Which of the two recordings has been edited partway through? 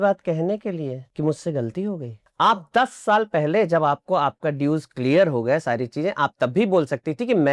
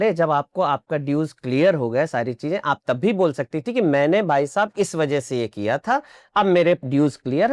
first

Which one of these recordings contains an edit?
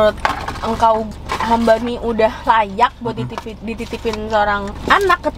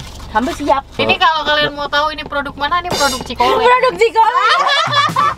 second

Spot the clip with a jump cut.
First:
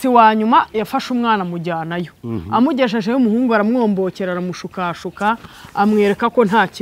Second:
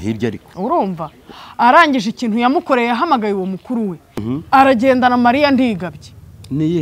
second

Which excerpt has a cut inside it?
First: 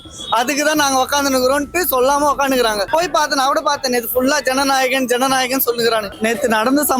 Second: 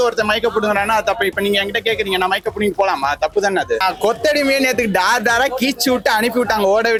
first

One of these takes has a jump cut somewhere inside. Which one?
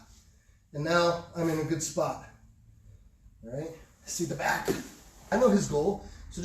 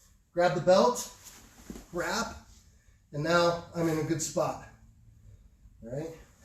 first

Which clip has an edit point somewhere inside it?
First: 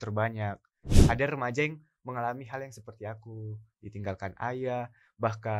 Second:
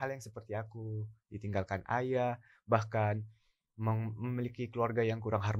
first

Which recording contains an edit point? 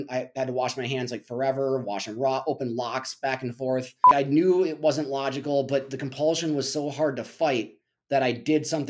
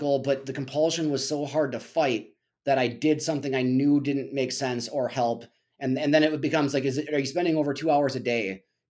first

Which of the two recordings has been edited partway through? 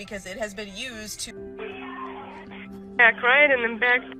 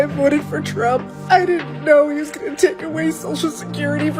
first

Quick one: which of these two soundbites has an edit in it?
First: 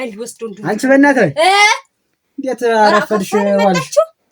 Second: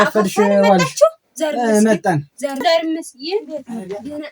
second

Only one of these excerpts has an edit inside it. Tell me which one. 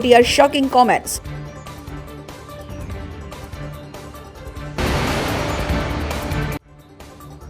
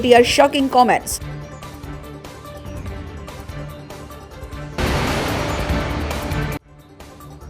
second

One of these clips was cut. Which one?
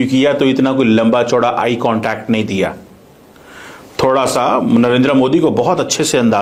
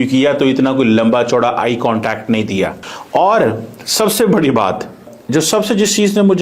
second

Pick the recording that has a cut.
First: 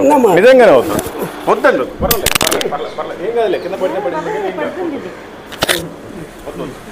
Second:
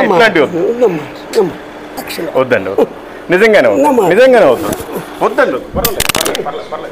second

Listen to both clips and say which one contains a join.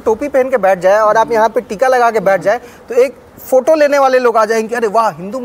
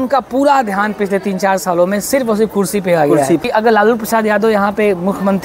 second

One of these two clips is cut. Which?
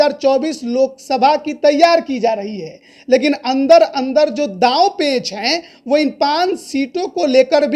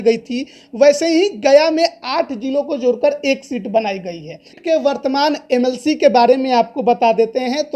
second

